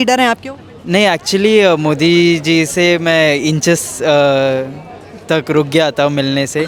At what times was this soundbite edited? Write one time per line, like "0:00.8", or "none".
none